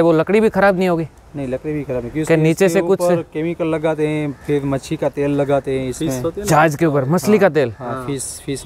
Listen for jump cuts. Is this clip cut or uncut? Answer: uncut